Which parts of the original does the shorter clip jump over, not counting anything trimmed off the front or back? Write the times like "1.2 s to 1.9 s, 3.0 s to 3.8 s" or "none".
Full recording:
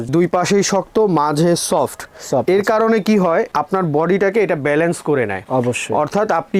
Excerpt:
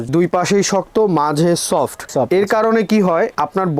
2.0 s to 2.2 s